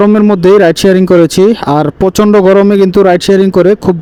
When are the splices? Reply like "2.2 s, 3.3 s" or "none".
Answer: none